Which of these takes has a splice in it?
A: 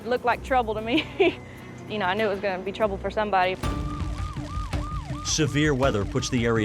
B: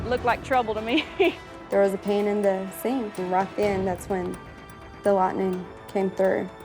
B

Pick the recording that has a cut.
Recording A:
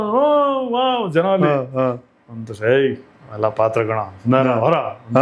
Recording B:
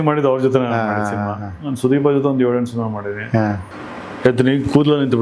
B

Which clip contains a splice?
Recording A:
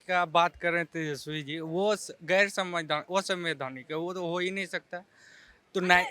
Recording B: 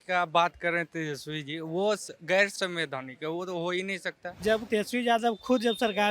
B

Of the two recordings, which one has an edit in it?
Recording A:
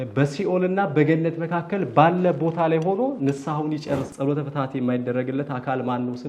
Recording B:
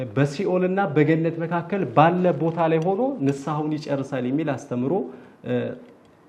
A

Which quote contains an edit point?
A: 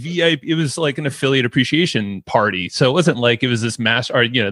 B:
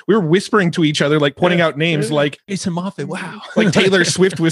B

